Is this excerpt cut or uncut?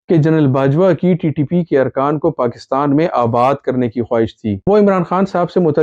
cut